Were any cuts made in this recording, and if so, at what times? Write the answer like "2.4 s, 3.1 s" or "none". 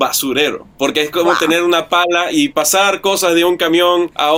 none